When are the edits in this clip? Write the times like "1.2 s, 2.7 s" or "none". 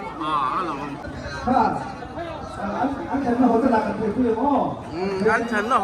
1.1 s

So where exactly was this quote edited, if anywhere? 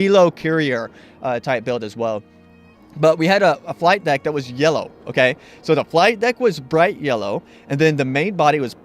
2.6 s

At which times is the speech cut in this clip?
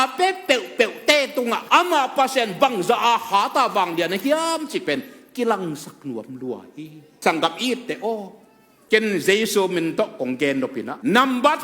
7.1 s

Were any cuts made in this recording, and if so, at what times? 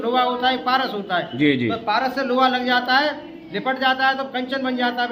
none

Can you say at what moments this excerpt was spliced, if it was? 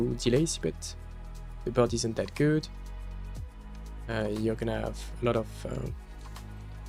none

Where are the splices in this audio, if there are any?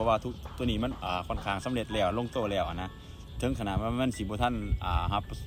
none

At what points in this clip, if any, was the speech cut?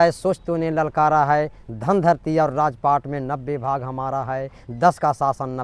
none

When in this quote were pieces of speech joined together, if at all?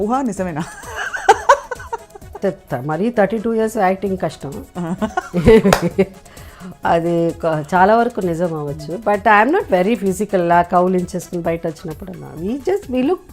2.4 s

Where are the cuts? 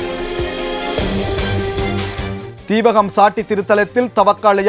2.5 s

